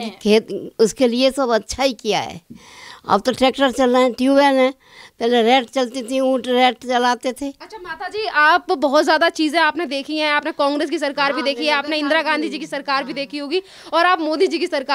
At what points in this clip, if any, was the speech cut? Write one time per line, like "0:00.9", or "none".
none